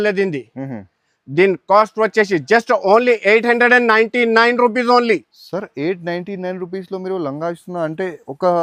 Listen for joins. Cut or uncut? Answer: uncut